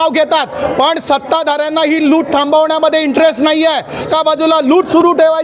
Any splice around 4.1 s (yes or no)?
yes